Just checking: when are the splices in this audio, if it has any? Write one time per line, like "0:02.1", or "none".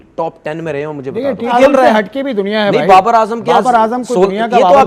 0:01.5